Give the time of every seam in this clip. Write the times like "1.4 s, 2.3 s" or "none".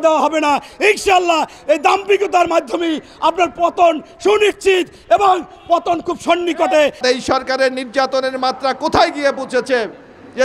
7.0 s

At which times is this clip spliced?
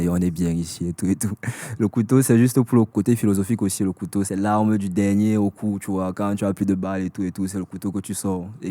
2.7 s, 4.3 s

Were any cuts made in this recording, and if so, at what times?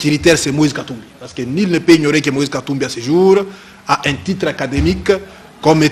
none

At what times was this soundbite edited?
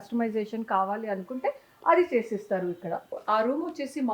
3.2 s

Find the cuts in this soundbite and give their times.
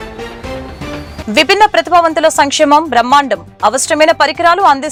none

